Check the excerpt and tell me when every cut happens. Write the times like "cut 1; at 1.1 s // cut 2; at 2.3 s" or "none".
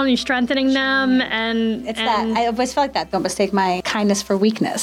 cut 1; at 3.8 s